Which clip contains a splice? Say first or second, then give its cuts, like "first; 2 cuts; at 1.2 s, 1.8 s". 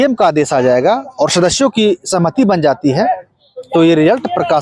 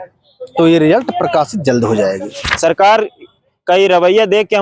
second; 1 cut; at 2.4 s